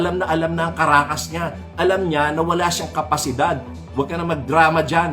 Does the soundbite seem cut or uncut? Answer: cut